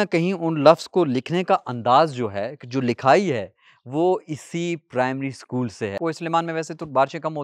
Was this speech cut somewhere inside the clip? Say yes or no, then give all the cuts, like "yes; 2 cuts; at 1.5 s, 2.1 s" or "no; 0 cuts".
yes; 1 cut; at 5.9 s